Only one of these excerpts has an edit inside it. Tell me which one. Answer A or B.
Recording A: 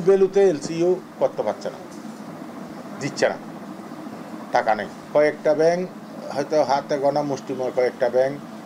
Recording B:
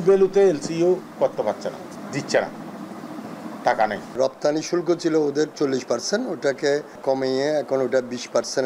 B